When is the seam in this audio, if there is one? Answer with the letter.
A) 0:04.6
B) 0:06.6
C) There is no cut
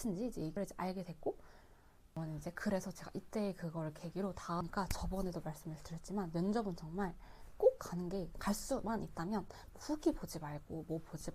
A